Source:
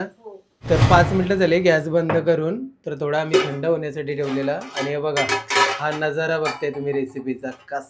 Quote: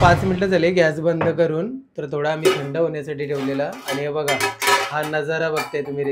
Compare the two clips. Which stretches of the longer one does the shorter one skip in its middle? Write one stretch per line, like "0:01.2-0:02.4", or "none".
none